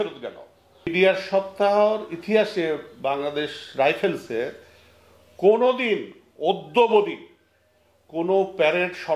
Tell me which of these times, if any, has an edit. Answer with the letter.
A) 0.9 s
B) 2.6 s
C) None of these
A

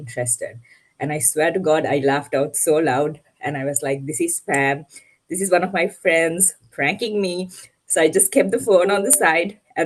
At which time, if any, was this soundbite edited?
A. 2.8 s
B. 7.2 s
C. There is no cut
C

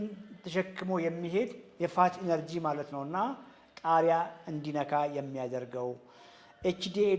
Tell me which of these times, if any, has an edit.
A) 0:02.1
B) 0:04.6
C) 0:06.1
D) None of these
D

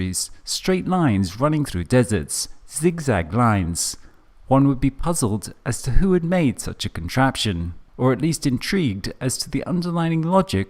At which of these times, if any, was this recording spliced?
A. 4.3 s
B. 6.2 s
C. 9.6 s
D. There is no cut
A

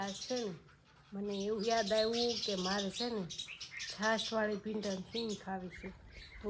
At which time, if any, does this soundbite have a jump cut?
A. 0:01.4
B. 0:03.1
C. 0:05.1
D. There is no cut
D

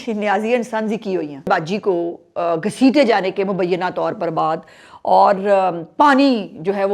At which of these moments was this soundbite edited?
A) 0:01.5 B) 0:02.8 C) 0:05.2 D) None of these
A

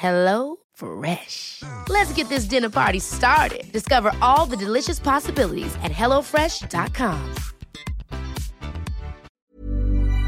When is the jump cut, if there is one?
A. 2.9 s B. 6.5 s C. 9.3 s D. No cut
C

